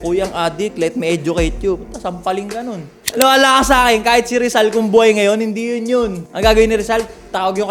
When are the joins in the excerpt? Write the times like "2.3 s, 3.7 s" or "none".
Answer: none